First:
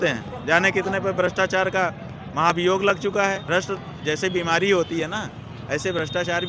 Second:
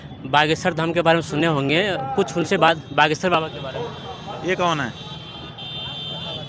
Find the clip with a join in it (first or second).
first